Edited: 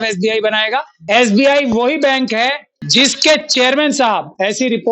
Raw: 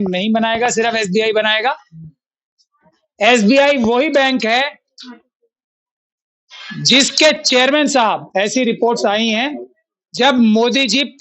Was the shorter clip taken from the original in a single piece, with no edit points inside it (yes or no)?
no